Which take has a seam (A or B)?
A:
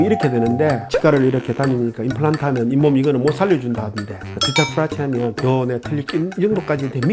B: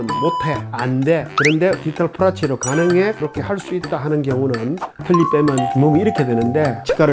B